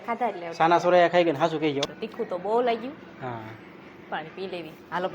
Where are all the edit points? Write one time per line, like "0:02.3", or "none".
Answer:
0:02.0